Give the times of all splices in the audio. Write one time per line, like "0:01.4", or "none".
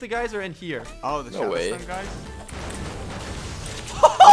none